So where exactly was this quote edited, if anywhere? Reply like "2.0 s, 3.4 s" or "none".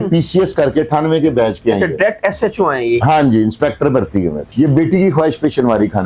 4.5 s